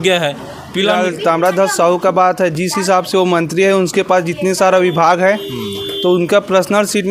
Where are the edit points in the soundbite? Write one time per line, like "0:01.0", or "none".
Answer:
0:00.9